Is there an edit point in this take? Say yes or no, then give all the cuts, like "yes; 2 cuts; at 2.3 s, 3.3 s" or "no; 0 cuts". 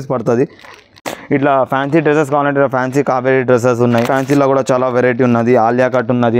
yes; 2 cuts; at 1.0 s, 4.1 s